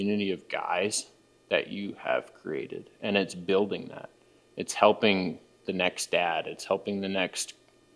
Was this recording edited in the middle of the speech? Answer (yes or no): no